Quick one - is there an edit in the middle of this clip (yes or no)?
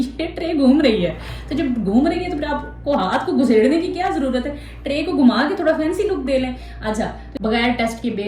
yes